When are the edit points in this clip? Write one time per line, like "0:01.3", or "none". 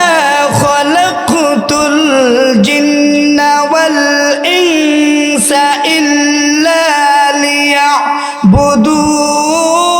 none